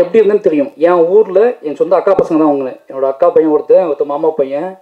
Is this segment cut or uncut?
uncut